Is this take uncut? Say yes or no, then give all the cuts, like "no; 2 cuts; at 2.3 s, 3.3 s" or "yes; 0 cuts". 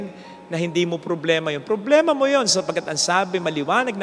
yes; 0 cuts